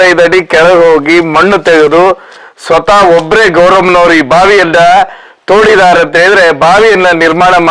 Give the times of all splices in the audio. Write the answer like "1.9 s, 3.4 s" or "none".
none